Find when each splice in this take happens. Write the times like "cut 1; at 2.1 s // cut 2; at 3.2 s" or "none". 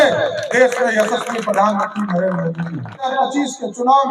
cut 1; at 3.1 s